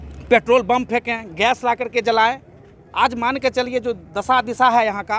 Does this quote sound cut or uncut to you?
uncut